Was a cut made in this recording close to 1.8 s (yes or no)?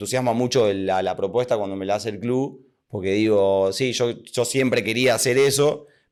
no